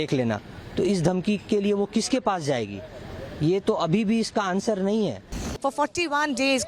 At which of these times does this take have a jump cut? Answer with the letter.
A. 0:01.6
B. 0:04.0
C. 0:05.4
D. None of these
C